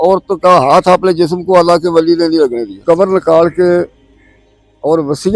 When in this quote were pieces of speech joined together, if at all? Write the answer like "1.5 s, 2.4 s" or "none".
2.8 s